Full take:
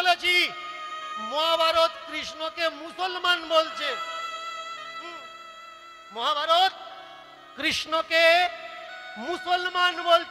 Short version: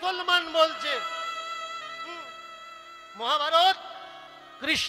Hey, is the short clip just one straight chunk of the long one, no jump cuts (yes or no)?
yes